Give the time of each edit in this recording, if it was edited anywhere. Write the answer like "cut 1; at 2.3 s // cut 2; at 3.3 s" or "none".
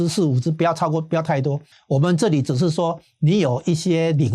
cut 1; at 1.7 s